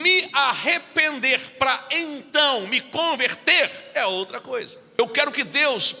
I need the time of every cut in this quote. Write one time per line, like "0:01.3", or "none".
0:05.0